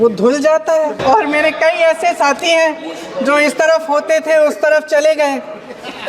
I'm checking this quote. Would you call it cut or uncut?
cut